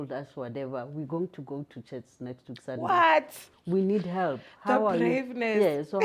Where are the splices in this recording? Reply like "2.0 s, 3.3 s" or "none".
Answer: 3.5 s